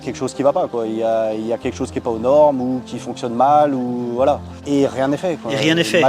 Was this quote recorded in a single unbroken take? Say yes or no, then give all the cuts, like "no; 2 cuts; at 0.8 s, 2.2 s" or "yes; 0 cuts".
yes; 0 cuts